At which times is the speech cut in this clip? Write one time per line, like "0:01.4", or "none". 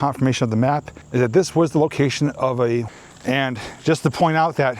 0:01.0
0:02.9